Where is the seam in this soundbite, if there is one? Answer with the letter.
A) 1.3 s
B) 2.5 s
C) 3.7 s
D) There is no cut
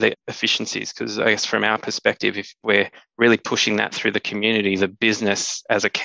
B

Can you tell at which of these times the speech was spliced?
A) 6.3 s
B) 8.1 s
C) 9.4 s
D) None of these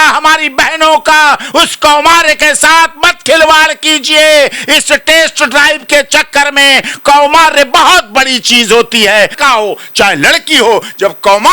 C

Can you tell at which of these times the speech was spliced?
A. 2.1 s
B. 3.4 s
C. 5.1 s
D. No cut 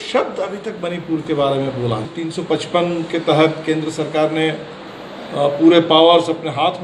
A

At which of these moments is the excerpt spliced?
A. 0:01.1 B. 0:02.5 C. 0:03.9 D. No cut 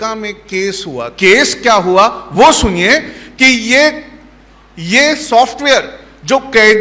A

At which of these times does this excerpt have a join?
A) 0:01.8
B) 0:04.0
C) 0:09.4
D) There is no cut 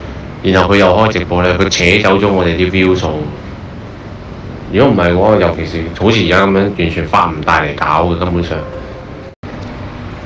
C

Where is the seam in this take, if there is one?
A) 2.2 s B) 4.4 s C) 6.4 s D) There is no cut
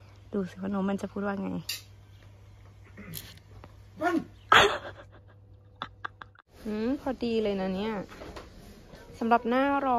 C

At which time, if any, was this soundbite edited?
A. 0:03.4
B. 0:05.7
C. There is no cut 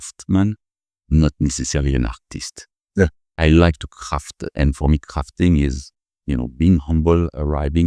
A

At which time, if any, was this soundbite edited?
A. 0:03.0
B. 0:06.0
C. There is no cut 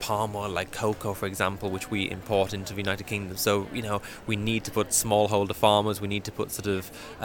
C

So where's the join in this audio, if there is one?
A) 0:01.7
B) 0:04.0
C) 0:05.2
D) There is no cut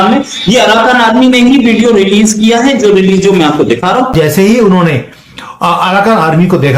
B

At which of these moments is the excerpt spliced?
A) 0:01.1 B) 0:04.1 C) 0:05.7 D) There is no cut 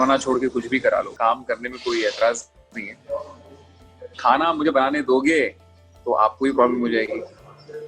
A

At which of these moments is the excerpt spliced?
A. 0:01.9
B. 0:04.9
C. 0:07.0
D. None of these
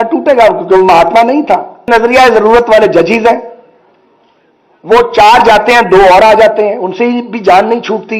A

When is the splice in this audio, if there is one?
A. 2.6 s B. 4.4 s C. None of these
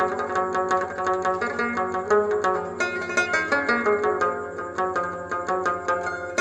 C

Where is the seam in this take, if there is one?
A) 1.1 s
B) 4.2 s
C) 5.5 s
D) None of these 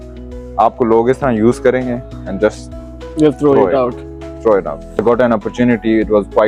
D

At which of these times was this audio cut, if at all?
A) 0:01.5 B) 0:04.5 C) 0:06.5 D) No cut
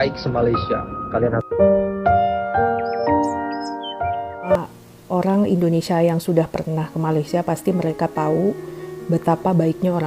B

